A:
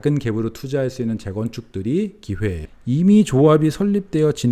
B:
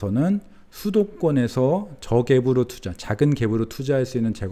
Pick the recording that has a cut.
A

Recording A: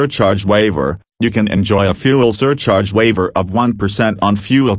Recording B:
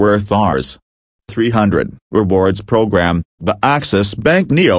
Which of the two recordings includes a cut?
B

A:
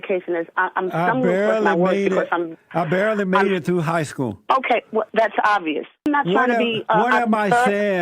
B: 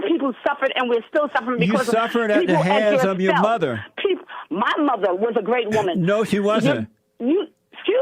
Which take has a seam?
A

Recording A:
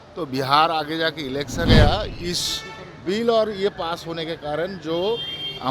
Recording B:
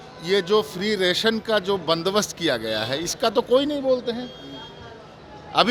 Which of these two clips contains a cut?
A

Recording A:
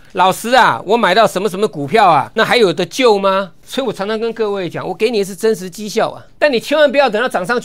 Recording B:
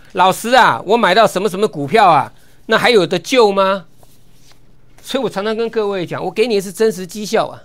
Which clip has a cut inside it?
A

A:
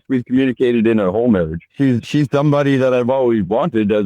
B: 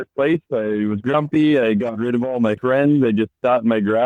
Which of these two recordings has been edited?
A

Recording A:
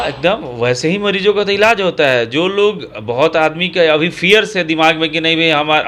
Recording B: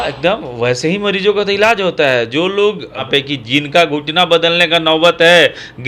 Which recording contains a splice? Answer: B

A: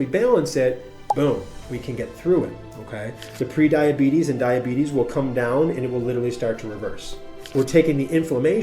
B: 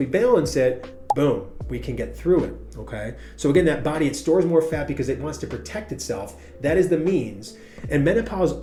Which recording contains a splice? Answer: A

